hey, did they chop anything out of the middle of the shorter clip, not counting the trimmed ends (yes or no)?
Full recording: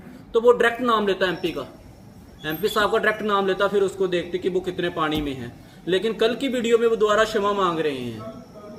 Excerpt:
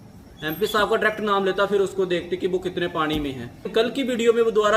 yes